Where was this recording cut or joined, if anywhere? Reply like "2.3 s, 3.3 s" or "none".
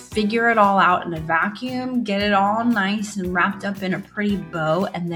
none